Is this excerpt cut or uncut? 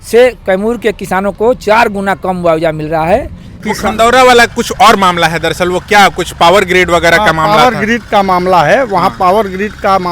cut